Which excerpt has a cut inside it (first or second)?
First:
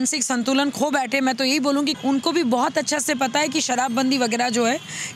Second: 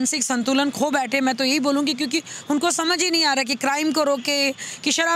first